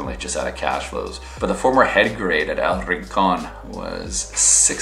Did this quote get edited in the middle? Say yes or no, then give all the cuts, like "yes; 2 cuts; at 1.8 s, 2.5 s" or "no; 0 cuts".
yes; 1 cut; at 1.2 s